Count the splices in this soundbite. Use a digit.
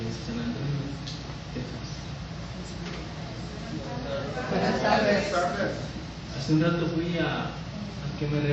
0